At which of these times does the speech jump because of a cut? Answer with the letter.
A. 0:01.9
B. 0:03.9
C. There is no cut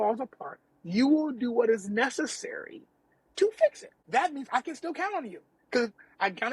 B